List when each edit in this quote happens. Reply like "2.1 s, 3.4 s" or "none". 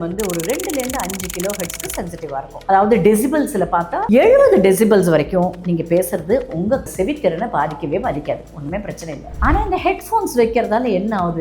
4.0 s, 9.3 s